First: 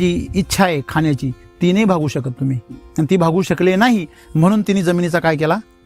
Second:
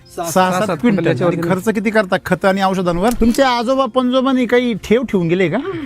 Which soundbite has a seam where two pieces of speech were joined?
second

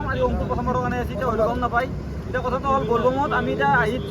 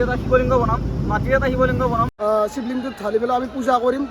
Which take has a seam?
second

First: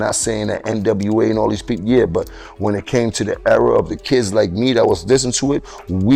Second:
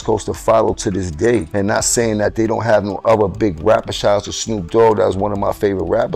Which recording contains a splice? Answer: second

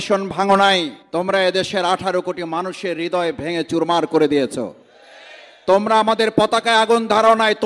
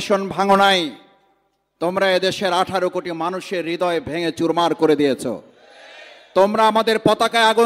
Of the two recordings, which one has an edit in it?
first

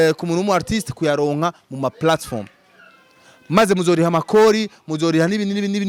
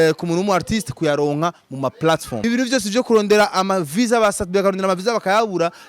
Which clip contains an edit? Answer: second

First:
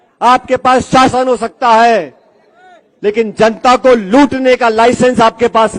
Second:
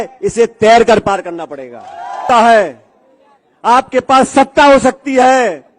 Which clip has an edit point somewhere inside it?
second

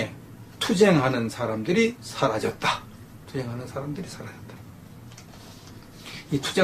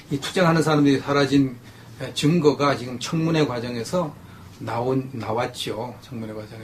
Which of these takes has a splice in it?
second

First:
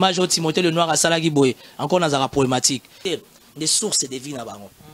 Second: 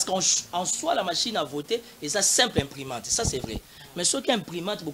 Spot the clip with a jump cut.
first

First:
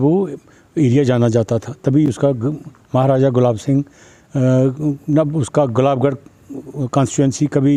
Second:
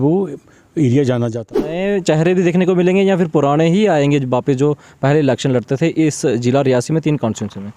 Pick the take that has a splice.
second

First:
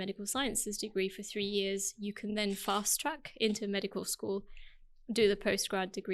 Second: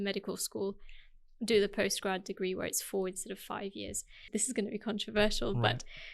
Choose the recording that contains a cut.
second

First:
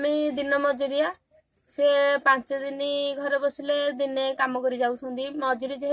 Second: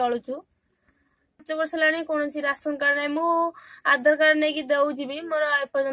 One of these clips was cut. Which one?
second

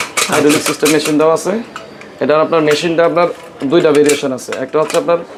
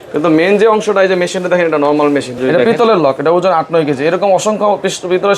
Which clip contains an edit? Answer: second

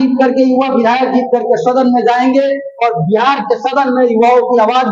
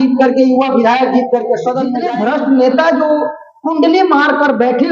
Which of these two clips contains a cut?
second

